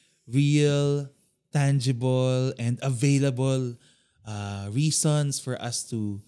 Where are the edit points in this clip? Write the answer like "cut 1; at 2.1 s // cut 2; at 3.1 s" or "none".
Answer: none